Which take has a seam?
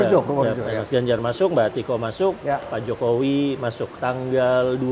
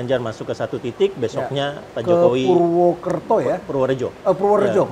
first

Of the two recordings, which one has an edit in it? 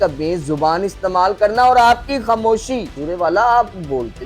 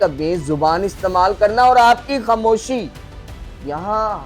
first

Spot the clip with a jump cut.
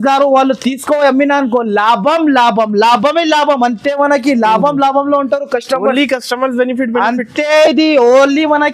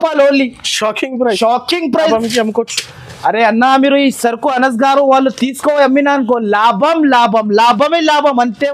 second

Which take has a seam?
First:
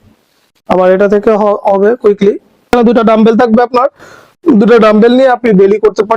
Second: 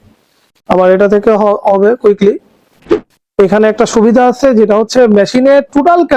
first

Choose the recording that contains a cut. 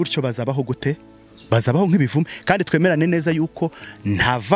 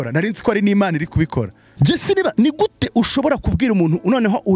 second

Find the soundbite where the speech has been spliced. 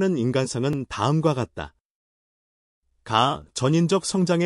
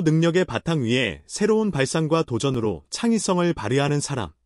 second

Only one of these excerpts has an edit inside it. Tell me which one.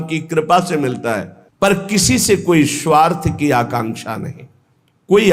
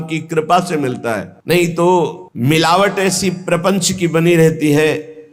first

